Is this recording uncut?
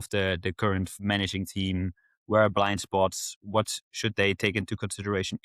yes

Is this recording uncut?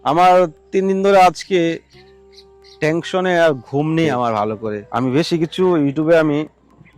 no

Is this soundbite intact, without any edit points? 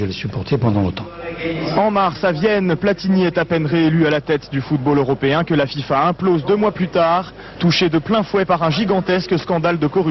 yes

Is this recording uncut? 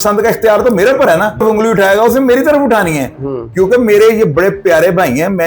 no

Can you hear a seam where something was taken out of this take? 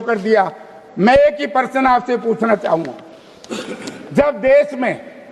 no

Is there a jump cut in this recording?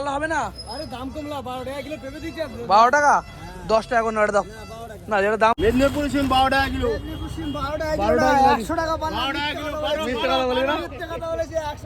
yes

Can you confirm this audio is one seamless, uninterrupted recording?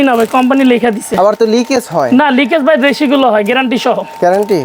yes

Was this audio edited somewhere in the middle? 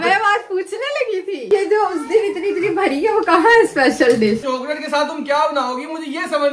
yes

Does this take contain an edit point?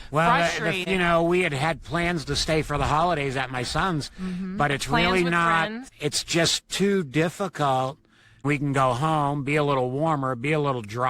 yes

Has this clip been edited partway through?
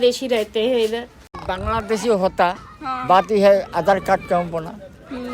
yes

